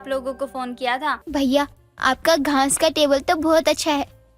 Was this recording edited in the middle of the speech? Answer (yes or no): yes